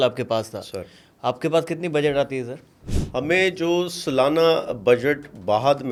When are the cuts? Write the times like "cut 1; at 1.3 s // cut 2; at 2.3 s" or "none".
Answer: none